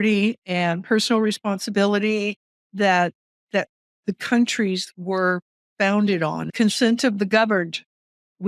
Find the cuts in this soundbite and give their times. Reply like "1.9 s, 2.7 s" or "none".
6.5 s